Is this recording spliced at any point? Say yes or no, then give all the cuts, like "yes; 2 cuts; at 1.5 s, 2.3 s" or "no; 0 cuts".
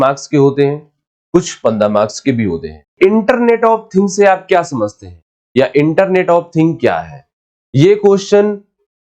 yes; 1 cut; at 2.9 s